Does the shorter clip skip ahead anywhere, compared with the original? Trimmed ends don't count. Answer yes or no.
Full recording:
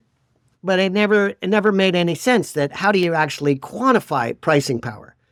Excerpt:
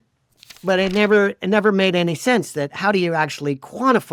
no